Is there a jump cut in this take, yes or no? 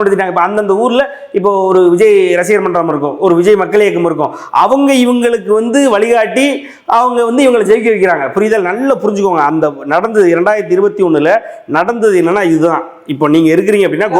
no